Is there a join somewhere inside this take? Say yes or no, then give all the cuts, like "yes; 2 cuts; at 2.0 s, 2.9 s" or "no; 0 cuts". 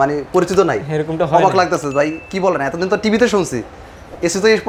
no; 0 cuts